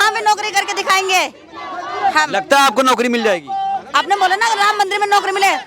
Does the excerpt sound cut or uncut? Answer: uncut